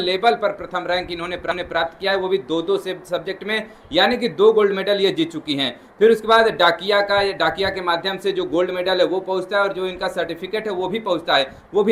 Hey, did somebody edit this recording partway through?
no; 0 cuts

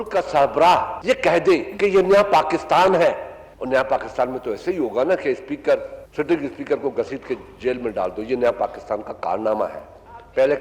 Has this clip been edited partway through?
yes; 2 cuts; at 0.9 s, 1.7 s

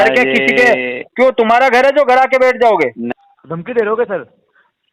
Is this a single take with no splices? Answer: no; 1 cut; at 3.1 s

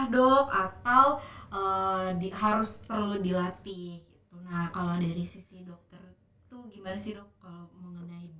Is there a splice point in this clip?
no; 0 cuts

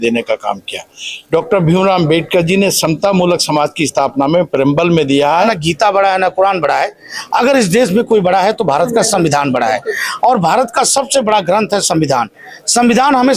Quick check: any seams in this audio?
yes; 1 cut; at 5.5 s

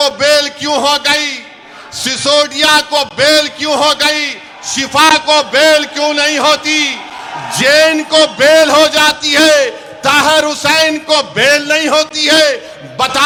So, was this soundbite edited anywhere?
no; 0 cuts

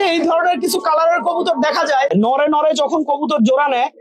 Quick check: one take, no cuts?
no; 1 cut; at 2.1 s

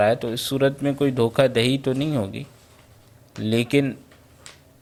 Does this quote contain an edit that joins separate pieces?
no; 0 cuts

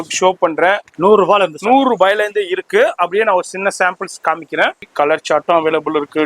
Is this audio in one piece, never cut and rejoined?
no; 2 cuts; at 0.9 s, 4.9 s

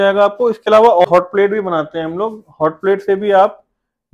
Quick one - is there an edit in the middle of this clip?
yes; 1 cut; at 1.0 s

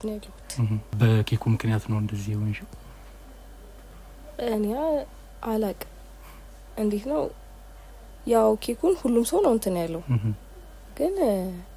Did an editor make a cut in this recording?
no; 0 cuts

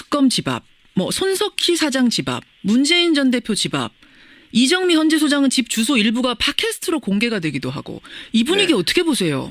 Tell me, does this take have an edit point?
no; 0 cuts

